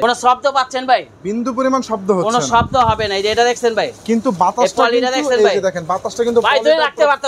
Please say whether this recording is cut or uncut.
uncut